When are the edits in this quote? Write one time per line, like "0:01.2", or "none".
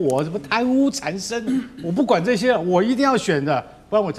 none